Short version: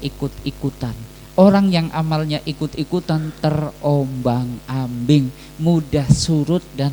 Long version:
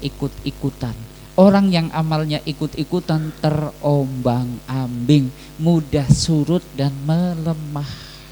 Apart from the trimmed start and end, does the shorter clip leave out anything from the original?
no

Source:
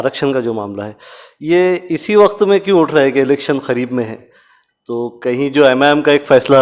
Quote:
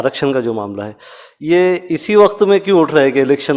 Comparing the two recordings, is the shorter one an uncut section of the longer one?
yes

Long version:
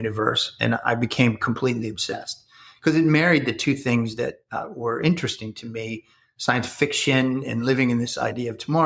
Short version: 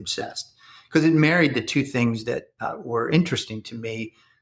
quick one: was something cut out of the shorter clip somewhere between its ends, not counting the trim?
no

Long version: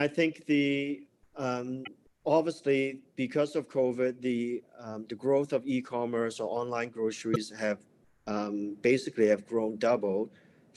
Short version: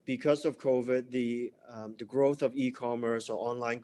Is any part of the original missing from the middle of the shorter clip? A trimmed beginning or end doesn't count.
no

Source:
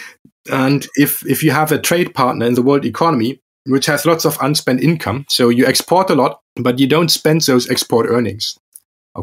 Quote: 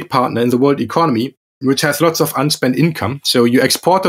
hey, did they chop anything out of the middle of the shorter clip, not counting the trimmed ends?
no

